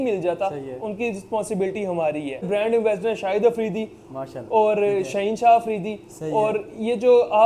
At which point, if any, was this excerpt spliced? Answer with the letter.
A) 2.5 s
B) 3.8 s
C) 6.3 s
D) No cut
A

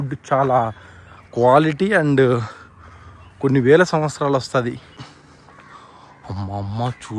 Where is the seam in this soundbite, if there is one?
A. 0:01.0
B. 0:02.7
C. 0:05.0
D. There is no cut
C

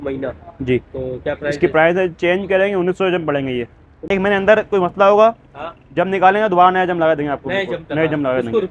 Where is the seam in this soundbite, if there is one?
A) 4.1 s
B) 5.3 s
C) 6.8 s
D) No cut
A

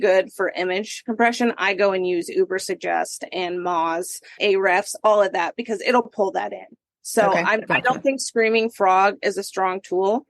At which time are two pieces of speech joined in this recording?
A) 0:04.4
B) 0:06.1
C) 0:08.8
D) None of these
A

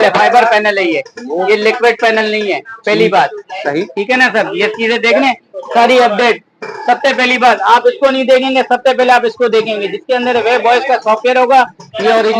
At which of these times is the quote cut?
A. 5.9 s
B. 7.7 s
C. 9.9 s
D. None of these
D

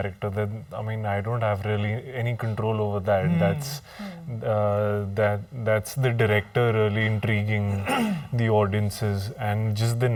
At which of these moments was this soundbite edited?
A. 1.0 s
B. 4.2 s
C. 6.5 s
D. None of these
D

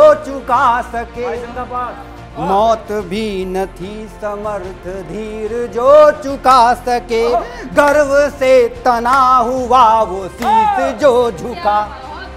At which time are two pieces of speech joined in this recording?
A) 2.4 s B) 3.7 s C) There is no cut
C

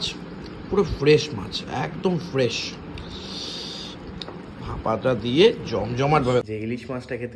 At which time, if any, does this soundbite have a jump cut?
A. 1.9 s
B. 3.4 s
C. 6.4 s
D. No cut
C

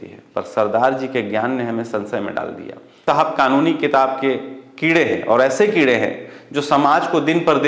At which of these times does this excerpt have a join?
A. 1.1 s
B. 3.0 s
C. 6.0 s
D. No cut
B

